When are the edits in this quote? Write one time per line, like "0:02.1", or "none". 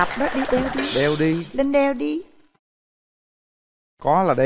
none